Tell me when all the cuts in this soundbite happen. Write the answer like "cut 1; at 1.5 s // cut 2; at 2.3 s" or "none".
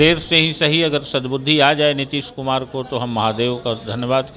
none